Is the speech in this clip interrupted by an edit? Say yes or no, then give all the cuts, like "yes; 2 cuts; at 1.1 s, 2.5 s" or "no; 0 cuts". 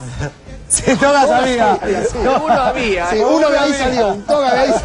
no; 0 cuts